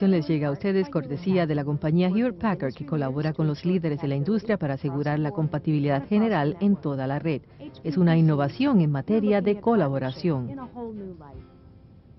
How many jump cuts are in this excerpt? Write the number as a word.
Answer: one